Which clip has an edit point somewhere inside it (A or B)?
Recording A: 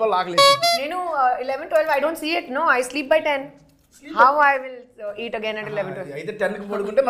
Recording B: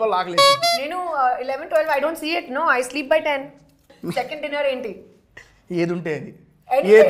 B